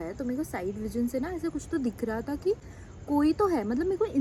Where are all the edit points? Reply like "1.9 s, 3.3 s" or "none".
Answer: none